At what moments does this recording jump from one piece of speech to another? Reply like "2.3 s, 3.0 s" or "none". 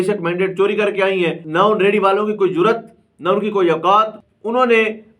1.4 s, 4.2 s